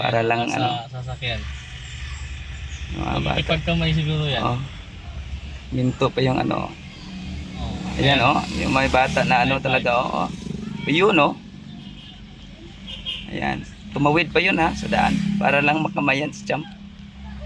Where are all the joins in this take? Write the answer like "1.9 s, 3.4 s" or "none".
none